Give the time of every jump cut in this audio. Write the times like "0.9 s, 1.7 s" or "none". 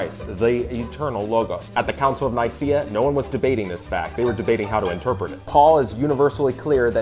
5.7 s